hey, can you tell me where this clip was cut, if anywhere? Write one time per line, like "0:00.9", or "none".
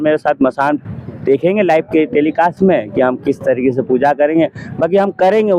none